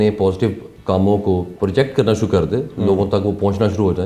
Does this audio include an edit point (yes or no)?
yes